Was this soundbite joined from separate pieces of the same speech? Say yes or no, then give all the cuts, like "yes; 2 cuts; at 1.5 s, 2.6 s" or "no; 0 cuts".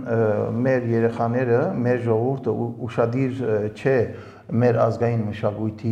no; 0 cuts